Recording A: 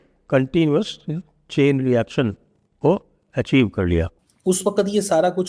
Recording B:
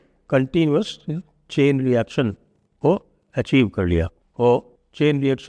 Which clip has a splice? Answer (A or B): A